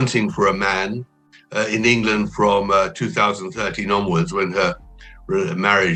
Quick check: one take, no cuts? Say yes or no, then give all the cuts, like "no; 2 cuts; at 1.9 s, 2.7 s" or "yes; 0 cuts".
yes; 0 cuts